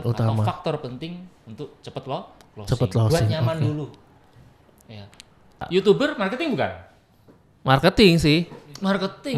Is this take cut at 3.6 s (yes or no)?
no